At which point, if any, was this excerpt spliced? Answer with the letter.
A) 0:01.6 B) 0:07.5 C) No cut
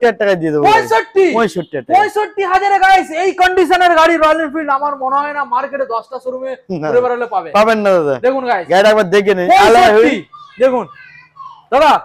C